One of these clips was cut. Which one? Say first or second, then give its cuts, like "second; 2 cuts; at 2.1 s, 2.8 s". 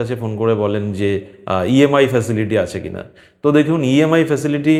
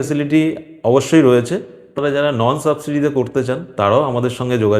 second; 1 cut; at 1.9 s